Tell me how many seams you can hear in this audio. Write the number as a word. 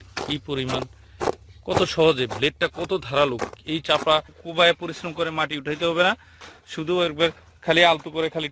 one